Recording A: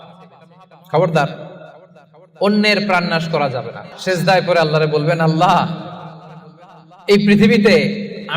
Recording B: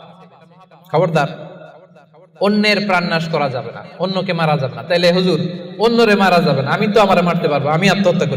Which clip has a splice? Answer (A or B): A